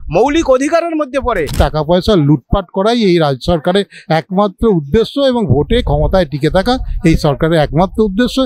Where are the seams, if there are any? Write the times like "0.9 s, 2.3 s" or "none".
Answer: 1.5 s